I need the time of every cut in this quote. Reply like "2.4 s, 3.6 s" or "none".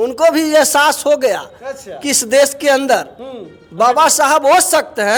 none